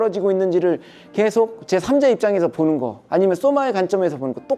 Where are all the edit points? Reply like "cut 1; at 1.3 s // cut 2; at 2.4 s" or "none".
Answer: none